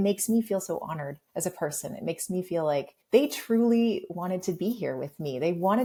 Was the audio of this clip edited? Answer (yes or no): no